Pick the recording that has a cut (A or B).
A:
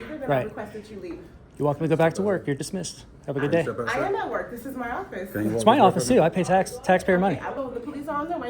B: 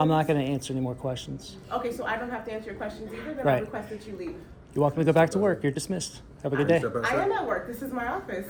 A